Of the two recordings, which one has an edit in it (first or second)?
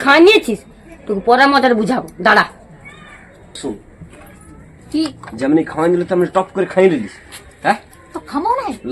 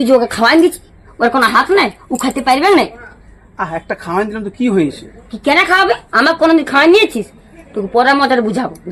first